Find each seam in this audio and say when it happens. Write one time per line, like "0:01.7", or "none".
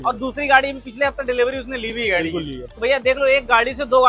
0:02.7